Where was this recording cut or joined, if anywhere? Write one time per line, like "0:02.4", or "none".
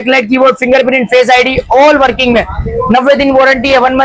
none